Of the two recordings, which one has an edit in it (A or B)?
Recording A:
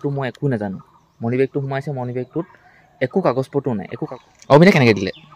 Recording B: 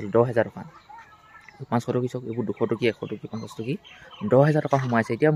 A